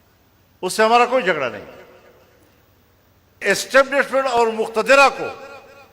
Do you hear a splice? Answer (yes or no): yes